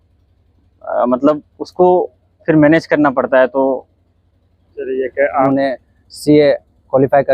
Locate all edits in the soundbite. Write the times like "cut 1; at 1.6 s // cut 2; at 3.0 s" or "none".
cut 1; at 5.5 s